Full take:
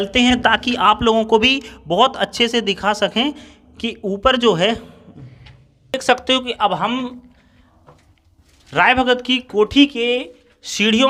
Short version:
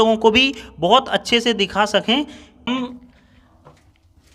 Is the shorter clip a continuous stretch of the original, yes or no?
no